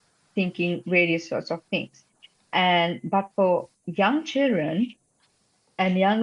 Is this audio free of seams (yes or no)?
yes